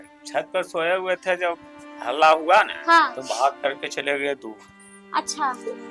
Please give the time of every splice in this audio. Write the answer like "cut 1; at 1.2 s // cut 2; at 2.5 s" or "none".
none